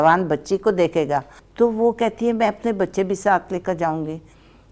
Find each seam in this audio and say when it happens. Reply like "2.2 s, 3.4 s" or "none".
1.4 s